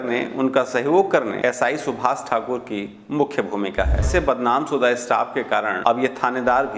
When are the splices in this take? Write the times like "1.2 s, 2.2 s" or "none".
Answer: 1.4 s, 4.1 s, 5.7 s